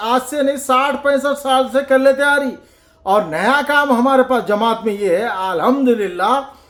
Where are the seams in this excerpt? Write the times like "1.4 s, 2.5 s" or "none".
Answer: none